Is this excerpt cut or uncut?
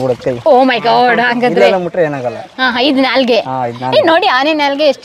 uncut